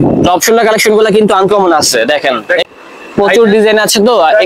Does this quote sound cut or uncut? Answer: cut